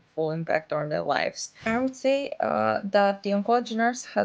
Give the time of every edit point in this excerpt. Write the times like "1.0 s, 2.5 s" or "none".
1.5 s